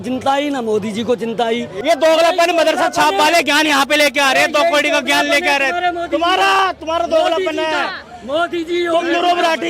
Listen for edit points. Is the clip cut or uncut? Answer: uncut